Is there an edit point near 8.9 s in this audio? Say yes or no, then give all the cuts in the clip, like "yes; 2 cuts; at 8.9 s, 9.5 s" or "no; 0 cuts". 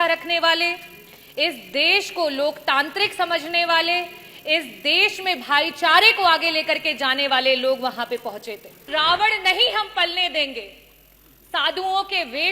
yes; 1 cut; at 8.9 s